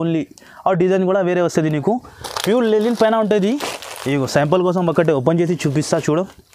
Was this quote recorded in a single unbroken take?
yes; 0 cuts

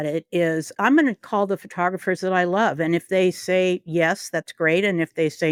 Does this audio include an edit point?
no; 0 cuts

